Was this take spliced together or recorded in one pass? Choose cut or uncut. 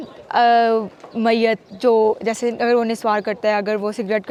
uncut